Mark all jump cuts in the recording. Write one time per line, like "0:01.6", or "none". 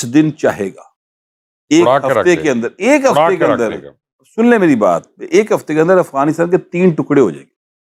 none